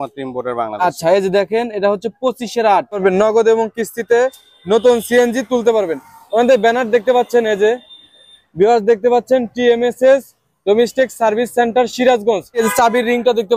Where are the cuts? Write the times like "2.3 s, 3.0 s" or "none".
3.0 s, 12.6 s